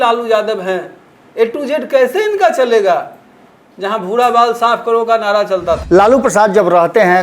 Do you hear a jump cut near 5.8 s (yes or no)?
yes